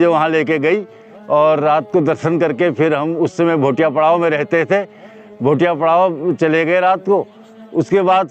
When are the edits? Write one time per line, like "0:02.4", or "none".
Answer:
none